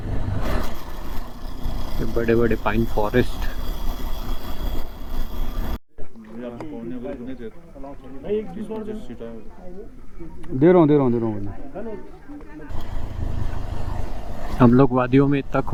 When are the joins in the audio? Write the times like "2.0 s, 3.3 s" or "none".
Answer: none